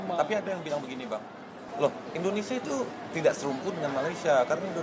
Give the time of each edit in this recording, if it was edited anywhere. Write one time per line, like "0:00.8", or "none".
0:01.6